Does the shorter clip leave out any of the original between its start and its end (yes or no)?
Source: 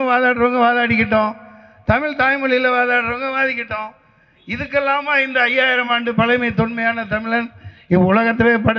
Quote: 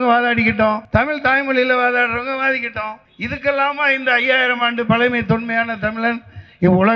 yes